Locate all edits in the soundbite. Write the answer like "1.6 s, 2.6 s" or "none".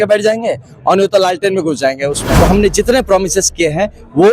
2.2 s